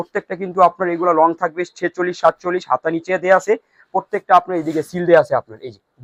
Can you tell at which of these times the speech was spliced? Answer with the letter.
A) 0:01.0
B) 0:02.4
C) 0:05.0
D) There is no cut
D